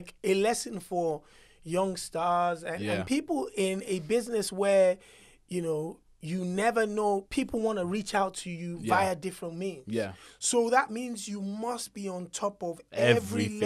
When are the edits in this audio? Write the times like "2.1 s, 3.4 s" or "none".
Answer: none